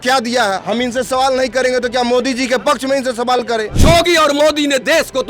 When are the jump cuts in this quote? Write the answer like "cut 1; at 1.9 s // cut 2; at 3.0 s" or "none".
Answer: cut 1; at 3.7 s